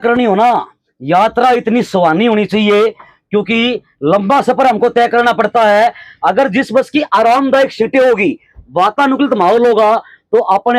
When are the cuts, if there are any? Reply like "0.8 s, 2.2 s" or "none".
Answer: none